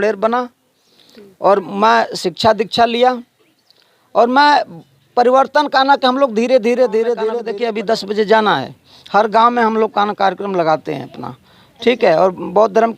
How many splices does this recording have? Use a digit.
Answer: 1